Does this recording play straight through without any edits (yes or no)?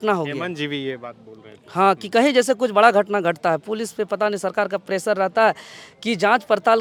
yes